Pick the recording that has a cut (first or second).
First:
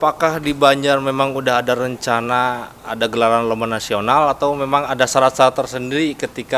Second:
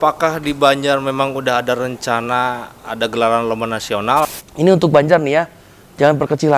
second